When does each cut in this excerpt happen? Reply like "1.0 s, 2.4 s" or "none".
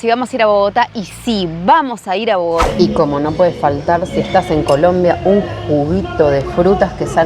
2.7 s